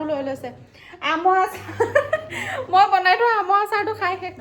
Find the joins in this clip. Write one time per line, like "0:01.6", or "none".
none